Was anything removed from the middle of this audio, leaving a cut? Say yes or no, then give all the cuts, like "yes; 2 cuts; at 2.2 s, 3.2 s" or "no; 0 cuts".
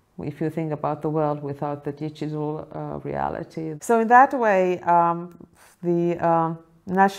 yes; 1 cut; at 3.8 s